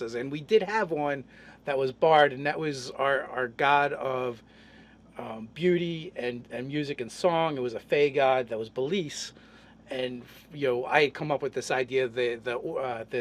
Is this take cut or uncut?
cut